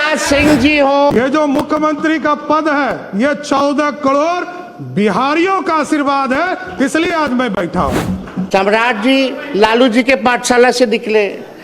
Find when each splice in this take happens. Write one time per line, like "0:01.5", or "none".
0:01.1
0:08.3